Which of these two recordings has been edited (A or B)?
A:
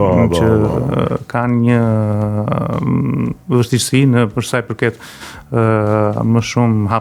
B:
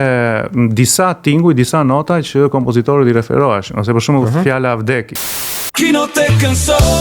B